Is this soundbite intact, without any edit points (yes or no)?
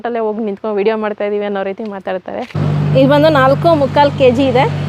no